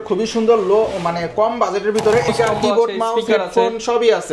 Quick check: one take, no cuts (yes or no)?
no